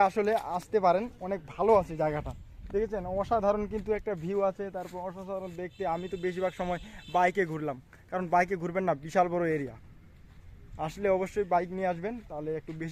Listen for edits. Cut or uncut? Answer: uncut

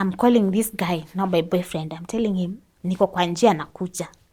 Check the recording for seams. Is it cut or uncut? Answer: uncut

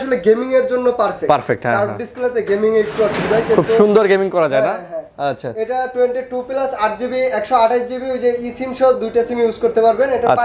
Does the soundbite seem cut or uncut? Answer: uncut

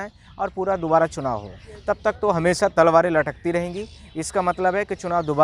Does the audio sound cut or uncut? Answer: cut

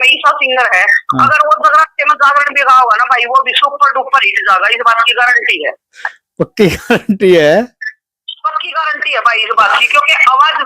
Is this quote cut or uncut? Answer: uncut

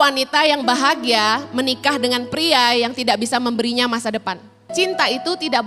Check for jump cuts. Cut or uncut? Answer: cut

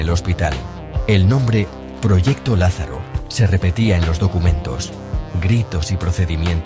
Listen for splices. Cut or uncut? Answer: cut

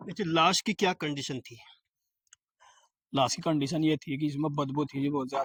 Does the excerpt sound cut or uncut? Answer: uncut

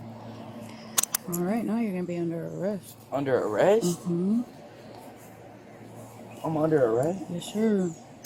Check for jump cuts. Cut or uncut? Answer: uncut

